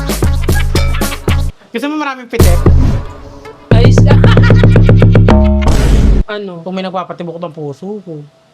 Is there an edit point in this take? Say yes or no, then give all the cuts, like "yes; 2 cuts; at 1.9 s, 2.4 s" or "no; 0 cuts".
yes; 2 cuts; at 1.6 s, 6.2 s